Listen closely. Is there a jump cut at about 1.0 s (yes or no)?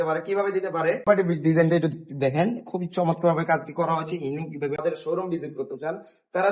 yes